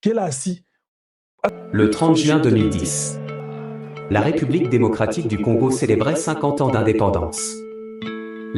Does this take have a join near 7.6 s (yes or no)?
no